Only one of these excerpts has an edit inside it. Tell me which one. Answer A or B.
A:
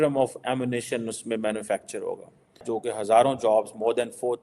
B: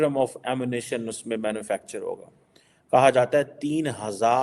A